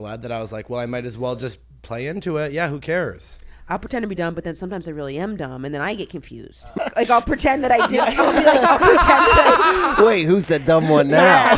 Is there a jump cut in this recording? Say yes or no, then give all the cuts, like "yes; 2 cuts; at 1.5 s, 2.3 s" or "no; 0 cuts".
yes; 1 cut; at 6.7 s